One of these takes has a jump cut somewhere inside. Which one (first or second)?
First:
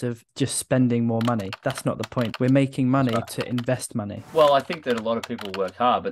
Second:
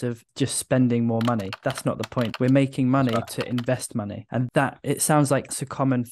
first